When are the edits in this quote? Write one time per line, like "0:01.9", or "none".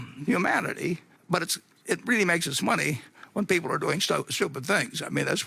0:01.1